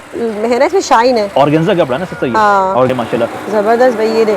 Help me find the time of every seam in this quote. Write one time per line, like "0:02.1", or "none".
0:02.9